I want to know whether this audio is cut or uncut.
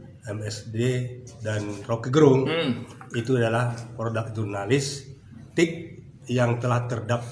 uncut